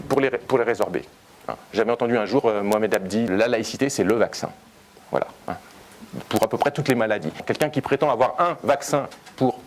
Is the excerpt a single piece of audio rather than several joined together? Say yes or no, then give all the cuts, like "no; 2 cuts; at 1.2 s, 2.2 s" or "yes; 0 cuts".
no; 2 cuts; at 3.3 s, 7.4 s